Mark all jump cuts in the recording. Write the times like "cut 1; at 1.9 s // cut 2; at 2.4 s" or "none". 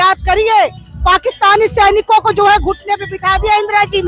none